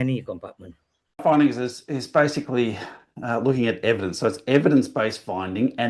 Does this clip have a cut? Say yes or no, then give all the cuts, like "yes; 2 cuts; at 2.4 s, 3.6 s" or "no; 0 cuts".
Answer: yes; 1 cut; at 1.2 s